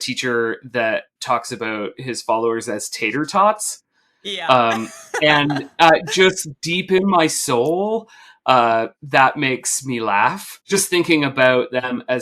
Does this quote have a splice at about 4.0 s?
no; 1 cut; at 10.6 s

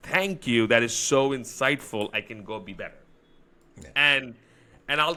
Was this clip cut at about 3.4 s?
no; 0 cuts

